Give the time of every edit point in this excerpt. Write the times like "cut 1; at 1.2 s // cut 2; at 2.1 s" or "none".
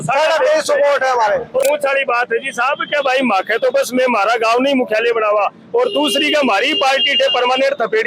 cut 1; at 1.6 s